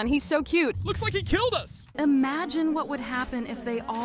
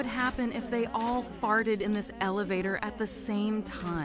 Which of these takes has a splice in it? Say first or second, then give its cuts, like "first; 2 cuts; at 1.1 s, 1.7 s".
first; 2 cuts; at 0.9 s, 1.8 s